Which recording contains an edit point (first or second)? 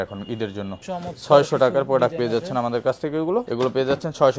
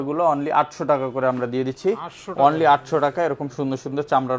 first